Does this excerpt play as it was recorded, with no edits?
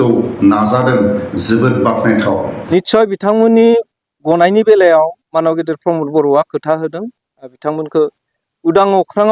no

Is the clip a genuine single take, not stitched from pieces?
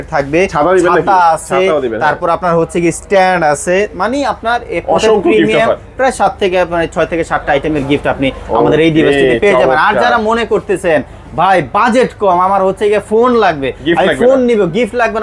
yes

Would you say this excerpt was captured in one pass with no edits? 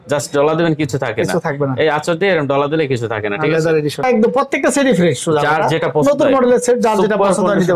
no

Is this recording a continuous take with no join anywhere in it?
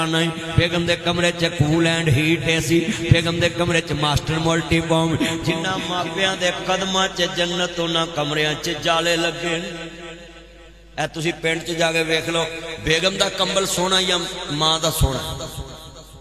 yes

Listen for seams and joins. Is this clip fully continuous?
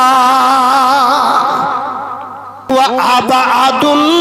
no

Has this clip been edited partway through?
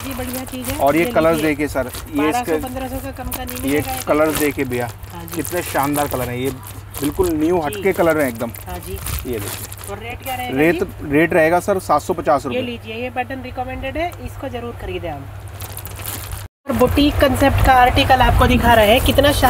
no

